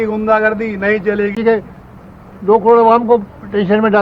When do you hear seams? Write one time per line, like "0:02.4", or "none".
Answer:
0:01.4